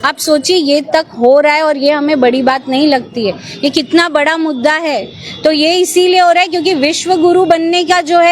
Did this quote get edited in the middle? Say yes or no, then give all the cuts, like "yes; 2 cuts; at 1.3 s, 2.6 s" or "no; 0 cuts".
no; 0 cuts